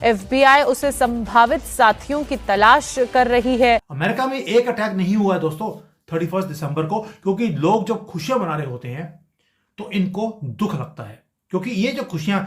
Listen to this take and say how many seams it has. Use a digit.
1